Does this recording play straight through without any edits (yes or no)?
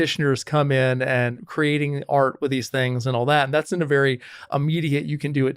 no